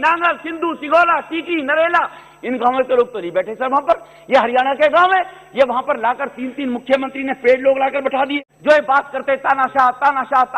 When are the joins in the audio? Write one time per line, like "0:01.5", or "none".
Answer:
0:08.3